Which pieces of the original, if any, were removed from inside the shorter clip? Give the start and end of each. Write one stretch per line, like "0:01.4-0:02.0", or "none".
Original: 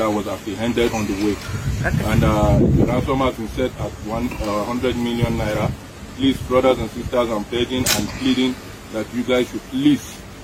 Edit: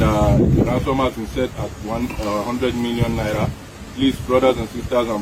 none